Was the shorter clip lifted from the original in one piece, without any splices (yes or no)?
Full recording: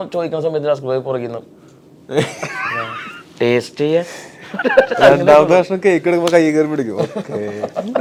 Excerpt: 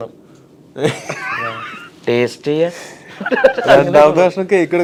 yes